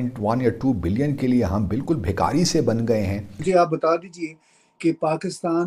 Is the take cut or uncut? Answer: cut